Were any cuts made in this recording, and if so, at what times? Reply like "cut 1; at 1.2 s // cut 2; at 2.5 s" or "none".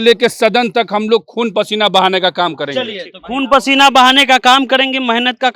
none